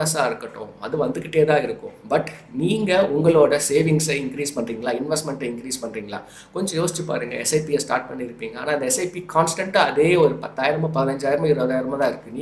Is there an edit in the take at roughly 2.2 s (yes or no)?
no